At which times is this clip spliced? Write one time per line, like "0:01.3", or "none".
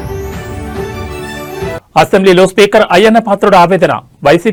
none